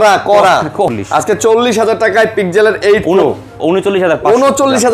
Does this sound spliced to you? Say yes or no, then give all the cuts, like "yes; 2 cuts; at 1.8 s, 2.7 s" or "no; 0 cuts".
yes; 1 cut; at 0.9 s